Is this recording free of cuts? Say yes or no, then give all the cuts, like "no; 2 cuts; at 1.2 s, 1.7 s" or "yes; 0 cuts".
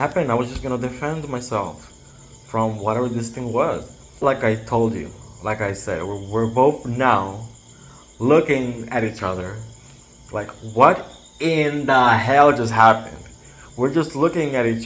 no; 1 cut; at 4.2 s